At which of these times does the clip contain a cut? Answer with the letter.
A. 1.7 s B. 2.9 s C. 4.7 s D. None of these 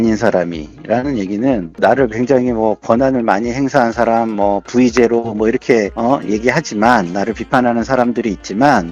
A